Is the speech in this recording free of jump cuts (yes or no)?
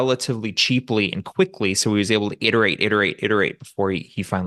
yes